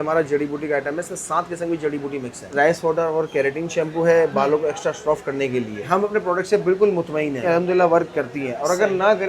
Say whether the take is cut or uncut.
cut